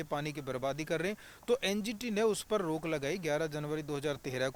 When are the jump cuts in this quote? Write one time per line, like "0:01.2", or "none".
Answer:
none